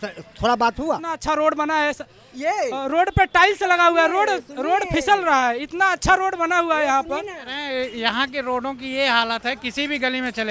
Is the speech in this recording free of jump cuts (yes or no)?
no